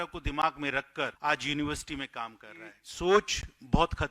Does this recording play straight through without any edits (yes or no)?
no